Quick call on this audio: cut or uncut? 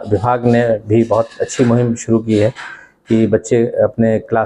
uncut